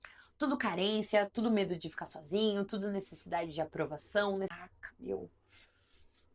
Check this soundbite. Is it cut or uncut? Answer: cut